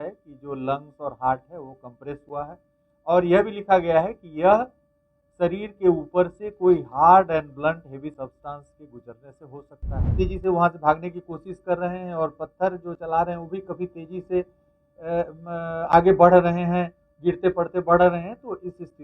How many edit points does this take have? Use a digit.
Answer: 1